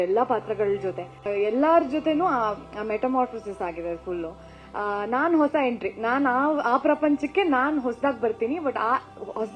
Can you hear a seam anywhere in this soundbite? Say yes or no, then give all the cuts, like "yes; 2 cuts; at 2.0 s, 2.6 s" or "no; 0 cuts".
yes; 1 cut; at 1.2 s